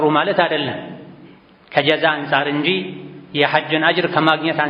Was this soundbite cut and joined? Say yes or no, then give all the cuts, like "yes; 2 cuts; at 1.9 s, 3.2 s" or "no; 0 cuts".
no; 0 cuts